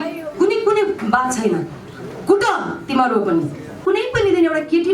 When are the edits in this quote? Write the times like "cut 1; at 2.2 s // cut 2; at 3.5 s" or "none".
cut 1; at 3.8 s